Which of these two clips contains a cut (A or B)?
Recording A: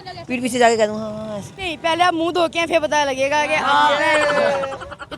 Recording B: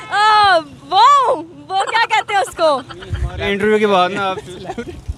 A